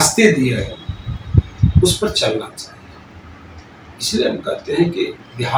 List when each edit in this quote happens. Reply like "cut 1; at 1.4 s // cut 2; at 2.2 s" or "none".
none